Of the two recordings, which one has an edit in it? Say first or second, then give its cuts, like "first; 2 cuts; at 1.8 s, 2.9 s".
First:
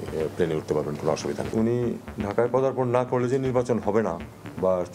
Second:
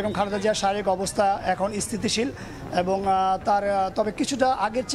first; 2 cuts; at 1.4 s, 2.1 s